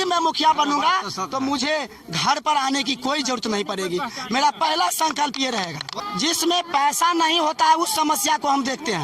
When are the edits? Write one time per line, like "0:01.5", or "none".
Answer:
0:06.0